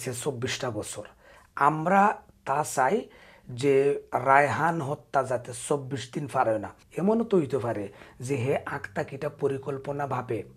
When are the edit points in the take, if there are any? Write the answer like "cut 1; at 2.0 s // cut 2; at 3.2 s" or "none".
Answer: cut 1; at 6.8 s